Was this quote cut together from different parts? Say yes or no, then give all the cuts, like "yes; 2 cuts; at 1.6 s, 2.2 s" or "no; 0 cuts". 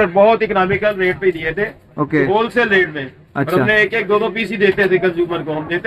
no; 0 cuts